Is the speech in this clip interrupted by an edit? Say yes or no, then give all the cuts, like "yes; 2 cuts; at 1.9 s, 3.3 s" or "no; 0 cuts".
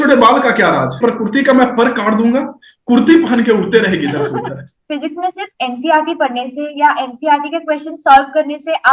yes; 2 cuts; at 1.0 s, 4.8 s